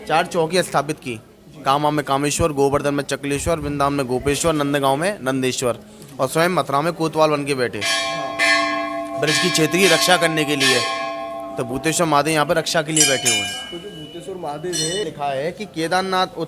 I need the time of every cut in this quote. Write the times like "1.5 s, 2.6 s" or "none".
15.1 s